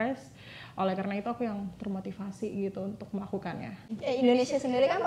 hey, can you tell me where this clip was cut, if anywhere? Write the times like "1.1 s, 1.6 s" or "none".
3.9 s